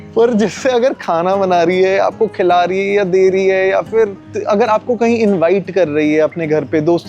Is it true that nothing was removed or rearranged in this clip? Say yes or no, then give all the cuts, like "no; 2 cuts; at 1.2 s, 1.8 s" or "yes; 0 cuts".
no; 1 cut; at 4.3 s